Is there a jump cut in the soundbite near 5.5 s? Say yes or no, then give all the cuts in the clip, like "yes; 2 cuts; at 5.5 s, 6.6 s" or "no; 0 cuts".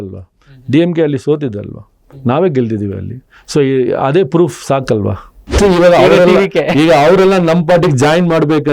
yes; 1 cut; at 5.5 s